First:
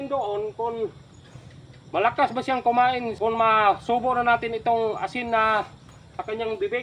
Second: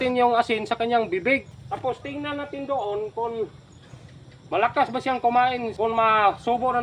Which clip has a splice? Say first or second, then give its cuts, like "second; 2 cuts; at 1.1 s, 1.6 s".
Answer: second; 1 cut; at 1.4 s